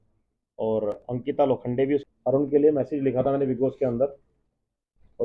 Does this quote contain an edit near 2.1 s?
yes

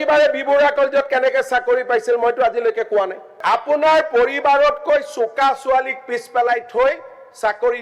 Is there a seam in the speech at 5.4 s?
no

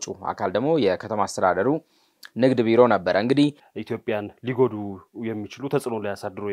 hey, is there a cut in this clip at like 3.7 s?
yes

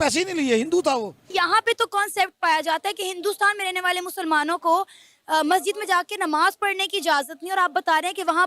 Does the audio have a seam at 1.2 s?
yes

